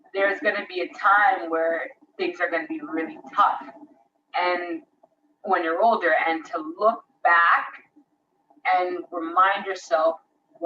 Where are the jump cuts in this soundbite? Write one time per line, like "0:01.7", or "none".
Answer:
none